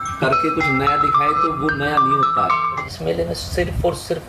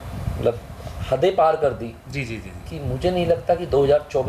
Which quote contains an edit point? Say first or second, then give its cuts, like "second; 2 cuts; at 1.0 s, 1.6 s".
first; 1 cut; at 2.9 s